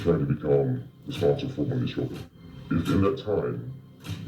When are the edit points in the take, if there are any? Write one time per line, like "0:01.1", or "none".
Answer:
0:02.3